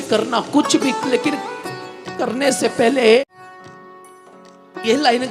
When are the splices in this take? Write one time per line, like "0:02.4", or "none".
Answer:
0:03.3